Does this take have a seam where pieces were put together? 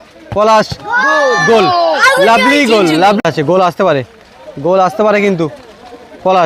yes; 1 cut; at 3.2 s

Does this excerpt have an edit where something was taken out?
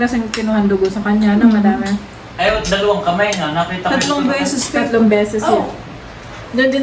no; 0 cuts

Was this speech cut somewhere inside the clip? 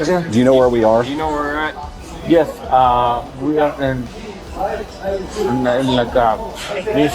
no; 0 cuts

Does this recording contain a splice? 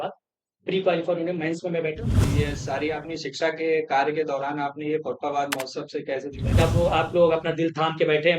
yes; 2 cuts; at 2.1 s, 6.6 s

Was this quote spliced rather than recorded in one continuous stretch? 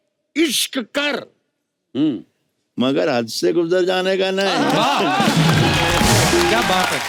no; 0 cuts

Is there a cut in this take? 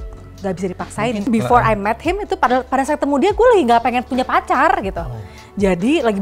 yes; 1 cut; at 1.2 s

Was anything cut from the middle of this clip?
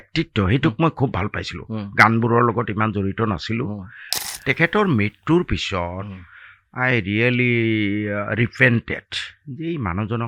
no; 0 cuts

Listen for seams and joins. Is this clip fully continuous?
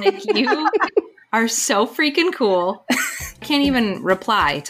no; 2 cuts; at 1.2 s, 3.4 s

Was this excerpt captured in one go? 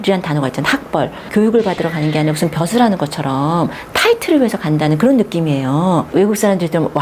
no; 2 cuts; at 1.2 s, 6.1 s

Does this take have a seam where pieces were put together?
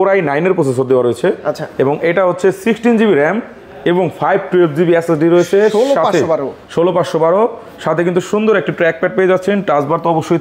no; 0 cuts

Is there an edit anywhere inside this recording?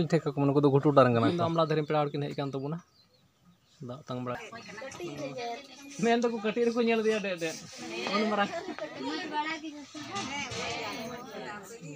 yes; 2 cuts; at 1.4 s, 4.4 s

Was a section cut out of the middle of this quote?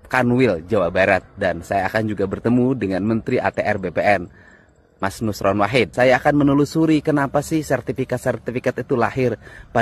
yes; 1 cut; at 5.9 s

